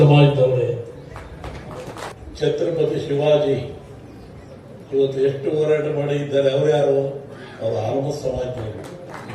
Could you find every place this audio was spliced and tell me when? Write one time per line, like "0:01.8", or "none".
0:02.1